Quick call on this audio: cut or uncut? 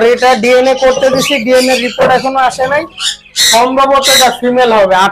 uncut